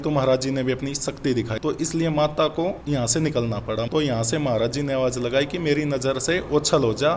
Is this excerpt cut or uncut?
cut